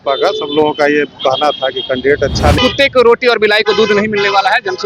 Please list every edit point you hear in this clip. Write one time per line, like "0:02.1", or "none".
0:02.6

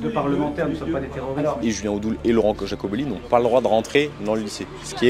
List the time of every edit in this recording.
0:01.6

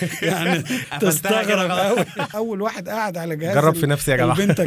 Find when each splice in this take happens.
0:02.3

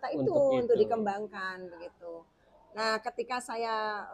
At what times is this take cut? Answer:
none

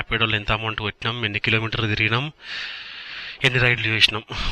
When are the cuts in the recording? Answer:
none

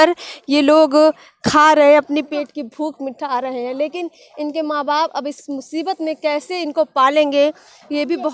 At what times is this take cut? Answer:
none

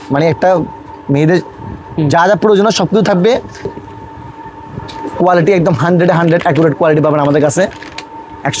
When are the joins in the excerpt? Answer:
0:03.8

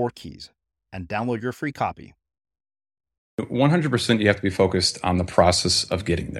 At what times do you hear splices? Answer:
0:03.4

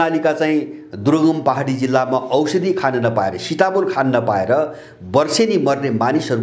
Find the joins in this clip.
none

